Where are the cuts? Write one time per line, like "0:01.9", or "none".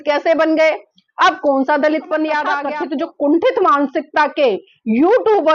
0:02.6